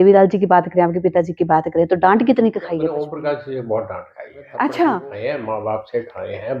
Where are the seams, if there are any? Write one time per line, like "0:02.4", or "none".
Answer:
0:02.9
0:05.1